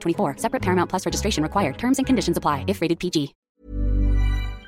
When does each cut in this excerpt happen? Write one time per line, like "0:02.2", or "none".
0:03.4